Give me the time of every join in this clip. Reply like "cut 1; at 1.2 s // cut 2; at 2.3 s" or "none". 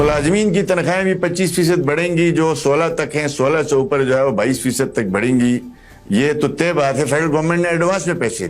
none